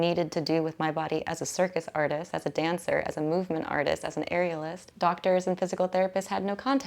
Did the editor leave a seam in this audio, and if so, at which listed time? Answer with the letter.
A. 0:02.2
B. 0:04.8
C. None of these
B